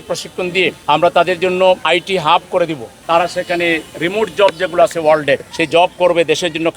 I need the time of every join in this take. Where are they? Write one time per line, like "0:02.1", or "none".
0:00.8
0:01.8
0:02.9
0:05.5